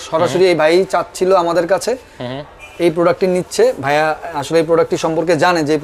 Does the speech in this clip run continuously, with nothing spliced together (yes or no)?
yes